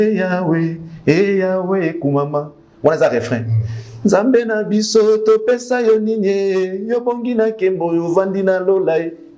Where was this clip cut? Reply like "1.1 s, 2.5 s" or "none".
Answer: none